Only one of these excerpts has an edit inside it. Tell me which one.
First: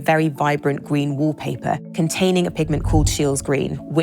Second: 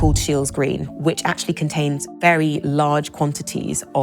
first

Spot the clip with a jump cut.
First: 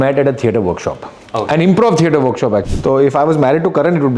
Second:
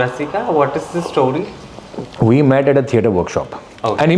first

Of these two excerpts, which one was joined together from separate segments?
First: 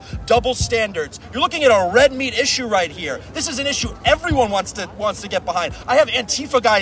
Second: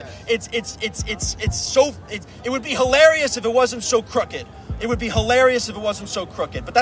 first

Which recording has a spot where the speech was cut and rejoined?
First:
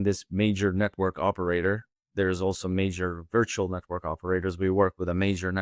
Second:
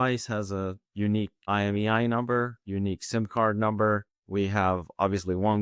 second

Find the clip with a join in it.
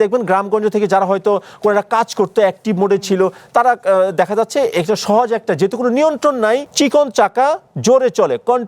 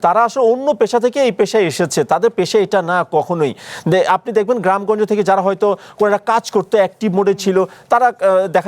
first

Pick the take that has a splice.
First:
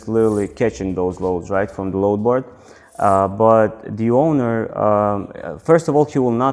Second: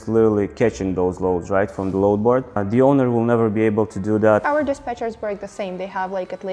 second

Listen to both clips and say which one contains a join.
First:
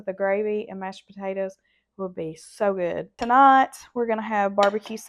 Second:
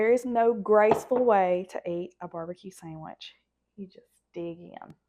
first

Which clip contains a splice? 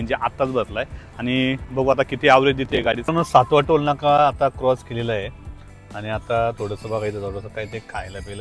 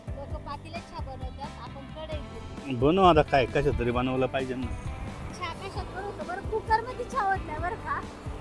first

